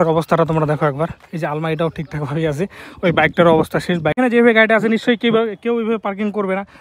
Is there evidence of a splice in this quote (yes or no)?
yes